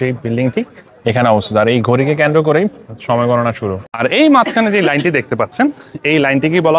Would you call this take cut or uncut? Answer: uncut